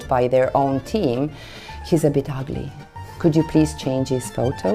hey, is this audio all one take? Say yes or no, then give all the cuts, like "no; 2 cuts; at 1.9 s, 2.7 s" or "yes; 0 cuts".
yes; 0 cuts